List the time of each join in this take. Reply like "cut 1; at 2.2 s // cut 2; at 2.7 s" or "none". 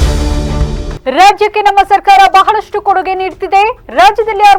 none